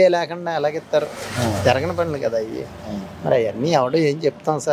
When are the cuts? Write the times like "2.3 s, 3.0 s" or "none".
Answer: none